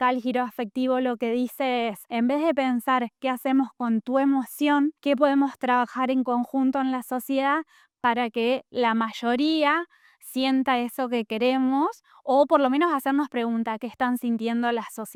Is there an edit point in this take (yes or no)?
no